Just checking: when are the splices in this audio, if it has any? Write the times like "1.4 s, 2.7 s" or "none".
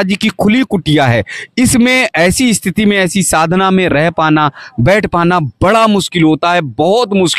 none